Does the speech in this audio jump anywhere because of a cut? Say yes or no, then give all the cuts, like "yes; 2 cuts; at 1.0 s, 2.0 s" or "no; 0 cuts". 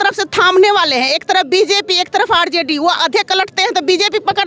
no; 0 cuts